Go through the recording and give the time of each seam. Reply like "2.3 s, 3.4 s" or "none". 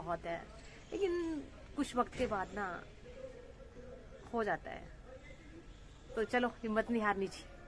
none